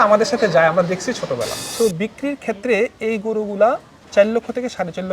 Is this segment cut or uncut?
cut